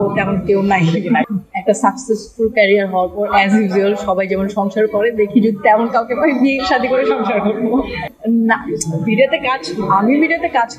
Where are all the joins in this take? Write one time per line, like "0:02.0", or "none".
0:01.2
0:08.1